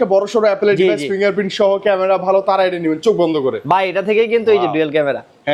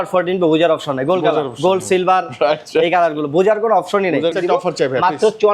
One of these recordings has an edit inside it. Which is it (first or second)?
second